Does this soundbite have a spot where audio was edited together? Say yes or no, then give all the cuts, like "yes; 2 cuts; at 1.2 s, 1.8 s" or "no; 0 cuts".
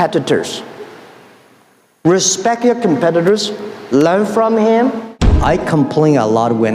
yes; 1 cut; at 5.2 s